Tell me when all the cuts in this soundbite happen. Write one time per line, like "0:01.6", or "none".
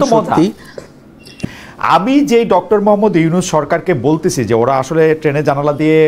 0:01.3

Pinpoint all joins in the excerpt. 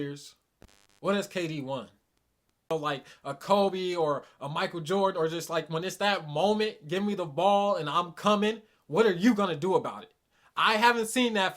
0:02.7

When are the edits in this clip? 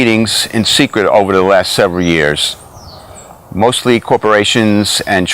0:03.2

